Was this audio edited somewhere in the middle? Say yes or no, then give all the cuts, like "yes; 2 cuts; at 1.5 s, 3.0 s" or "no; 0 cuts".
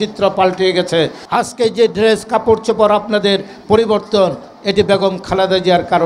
yes; 1 cut; at 1.2 s